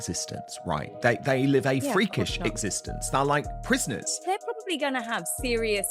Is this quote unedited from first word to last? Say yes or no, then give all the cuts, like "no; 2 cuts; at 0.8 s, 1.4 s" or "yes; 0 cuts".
no; 1 cut; at 4.1 s